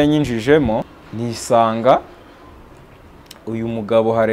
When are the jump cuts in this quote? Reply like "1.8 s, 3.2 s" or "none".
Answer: 1.0 s